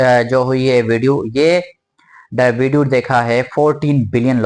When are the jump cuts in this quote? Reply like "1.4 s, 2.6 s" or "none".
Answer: none